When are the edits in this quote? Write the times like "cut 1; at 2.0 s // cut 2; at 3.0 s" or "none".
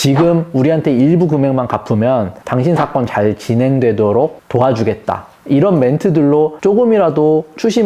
cut 1; at 6.5 s